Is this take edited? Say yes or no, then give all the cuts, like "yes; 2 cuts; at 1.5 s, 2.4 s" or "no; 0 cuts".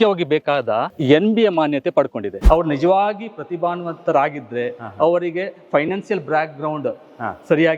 yes; 1 cut; at 2.3 s